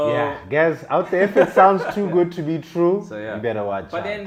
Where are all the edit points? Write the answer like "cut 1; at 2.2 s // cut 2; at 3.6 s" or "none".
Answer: none